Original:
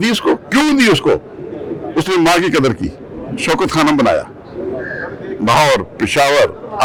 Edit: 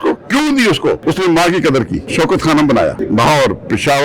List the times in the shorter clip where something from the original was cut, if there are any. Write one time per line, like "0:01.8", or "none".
0:01.0
0:02.0
0:03.0